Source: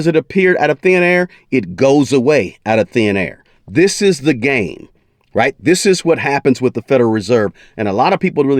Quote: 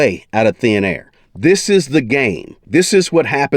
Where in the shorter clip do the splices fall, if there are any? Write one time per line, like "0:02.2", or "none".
0:02.6